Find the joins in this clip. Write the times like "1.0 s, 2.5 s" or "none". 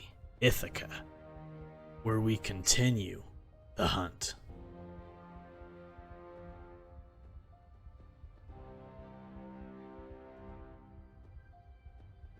4.3 s